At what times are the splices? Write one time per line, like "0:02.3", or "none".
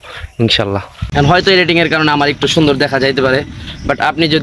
0:00.9